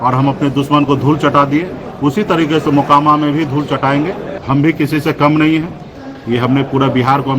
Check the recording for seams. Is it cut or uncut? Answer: cut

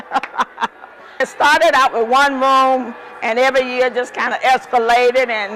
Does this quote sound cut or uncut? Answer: cut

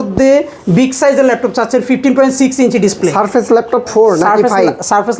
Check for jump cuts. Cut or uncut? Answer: uncut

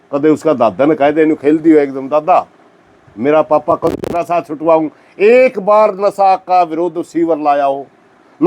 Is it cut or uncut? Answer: cut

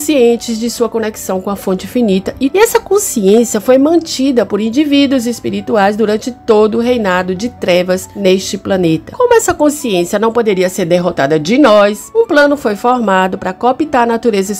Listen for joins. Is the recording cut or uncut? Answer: cut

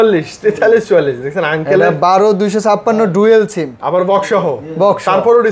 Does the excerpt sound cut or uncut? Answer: uncut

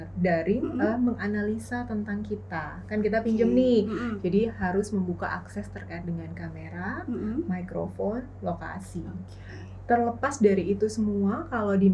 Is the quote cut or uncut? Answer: uncut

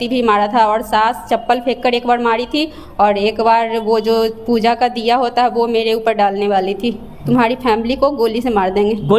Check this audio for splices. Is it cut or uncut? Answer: cut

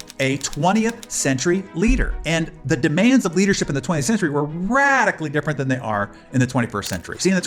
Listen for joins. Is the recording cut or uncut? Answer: uncut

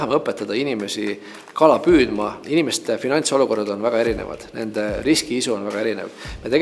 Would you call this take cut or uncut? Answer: cut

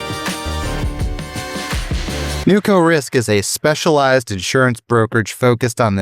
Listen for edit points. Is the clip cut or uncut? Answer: cut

